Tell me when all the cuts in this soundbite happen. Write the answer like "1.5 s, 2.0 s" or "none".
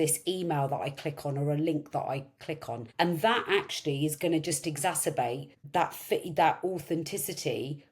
2.8 s, 5.5 s